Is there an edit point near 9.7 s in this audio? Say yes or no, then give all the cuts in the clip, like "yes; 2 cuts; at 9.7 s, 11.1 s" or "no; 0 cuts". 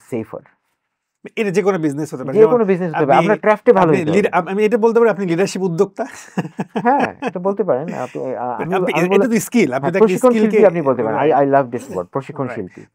no; 0 cuts